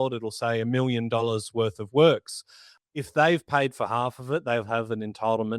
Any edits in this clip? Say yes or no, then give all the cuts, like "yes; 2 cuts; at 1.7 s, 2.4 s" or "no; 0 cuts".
yes; 1 cut; at 2.7 s